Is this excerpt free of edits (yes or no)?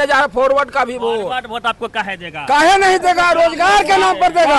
yes